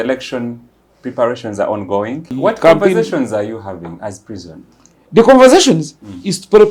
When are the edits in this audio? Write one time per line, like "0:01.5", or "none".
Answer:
0:02.3